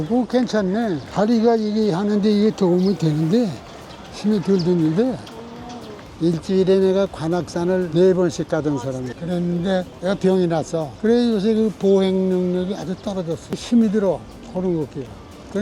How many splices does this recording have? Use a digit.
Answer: 3